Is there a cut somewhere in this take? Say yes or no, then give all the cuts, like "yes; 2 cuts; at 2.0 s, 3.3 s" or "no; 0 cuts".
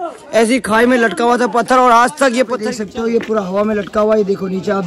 yes; 1 cut; at 2.6 s